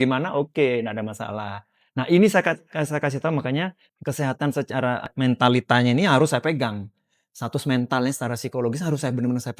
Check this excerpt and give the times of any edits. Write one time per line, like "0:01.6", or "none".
0:03.9
0:05.1